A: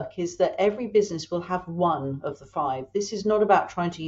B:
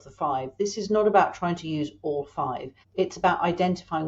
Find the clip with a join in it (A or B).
B